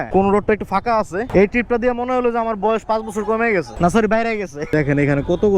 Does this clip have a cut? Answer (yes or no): yes